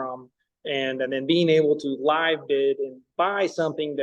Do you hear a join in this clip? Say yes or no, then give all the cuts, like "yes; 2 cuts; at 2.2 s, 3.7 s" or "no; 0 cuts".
no; 0 cuts